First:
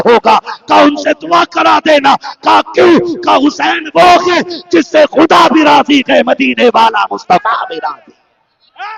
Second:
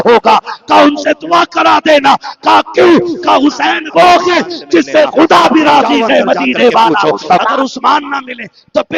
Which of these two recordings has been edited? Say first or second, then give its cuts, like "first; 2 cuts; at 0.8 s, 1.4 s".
second; 1 cut; at 7.5 s